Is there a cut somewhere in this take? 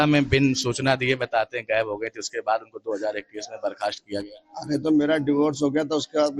no; 0 cuts

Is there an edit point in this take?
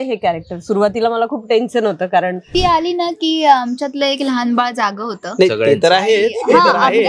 yes; 1 cut; at 2.5 s

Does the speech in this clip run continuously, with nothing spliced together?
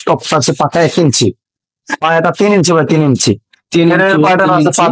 yes; 0 cuts

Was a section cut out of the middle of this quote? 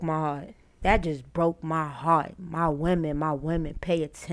no; 0 cuts

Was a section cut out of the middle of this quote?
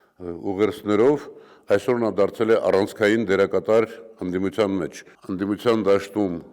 yes; 1 cut; at 5.1 s

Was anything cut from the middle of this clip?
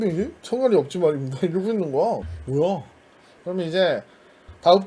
yes; 1 cut; at 2.3 s

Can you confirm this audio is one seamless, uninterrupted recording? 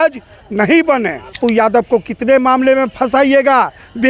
no; 1 cut; at 1.4 s

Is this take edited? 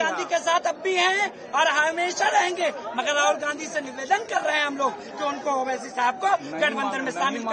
no; 0 cuts

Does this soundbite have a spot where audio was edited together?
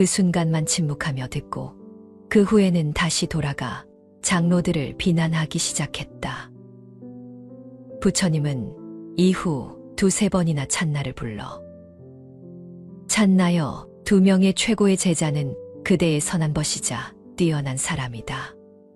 no; 0 cuts

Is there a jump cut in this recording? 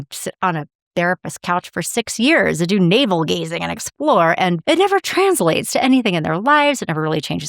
no; 0 cuts

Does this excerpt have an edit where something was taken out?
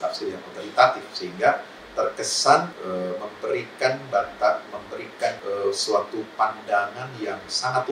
yes; 2 cuts; at 2.8 s, 5.4 s

